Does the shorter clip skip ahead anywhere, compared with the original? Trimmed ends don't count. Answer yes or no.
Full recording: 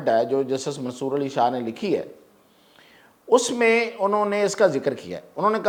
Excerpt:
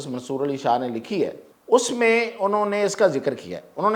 yes